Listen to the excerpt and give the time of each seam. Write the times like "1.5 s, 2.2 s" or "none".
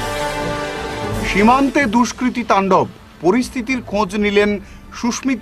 1.1 s